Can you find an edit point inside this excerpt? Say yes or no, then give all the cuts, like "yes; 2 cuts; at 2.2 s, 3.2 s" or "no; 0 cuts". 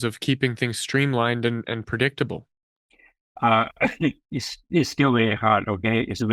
no; 0 cuts